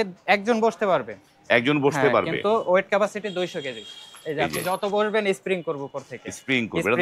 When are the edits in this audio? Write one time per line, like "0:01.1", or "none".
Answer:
none